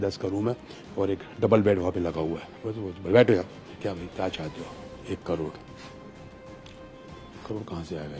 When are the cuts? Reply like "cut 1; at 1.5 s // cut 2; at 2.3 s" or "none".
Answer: cut 1; at 3.6 s